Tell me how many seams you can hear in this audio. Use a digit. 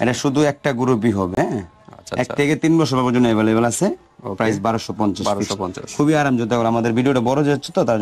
0